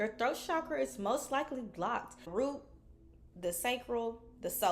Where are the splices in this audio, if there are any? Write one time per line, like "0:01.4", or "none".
0:02.3